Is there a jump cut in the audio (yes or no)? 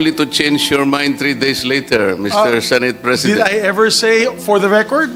no